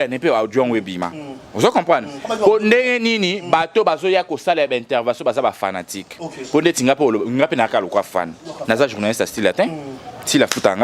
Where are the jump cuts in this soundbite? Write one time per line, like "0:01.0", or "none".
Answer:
none